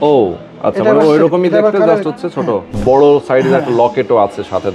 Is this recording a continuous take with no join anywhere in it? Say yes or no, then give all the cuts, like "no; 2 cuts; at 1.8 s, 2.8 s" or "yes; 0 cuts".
no; 1 cut; at 2.7 s